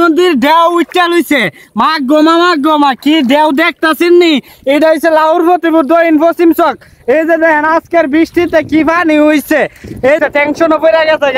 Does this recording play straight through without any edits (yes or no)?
yes